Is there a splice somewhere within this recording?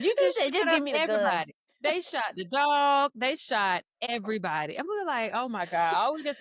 yes; 1 cut; at 4.1 s

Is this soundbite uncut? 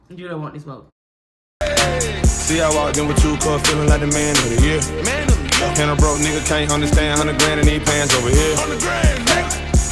no; 1 cut; at 1.1 s

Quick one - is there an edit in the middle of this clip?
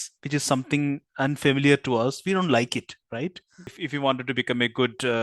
yes; 1 cut; at 3.8 s

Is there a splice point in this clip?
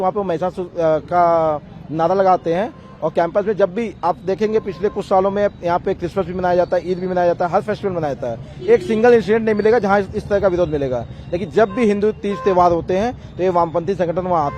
no; 0 cuts

